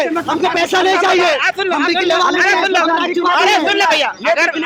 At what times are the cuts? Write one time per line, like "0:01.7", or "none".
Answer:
none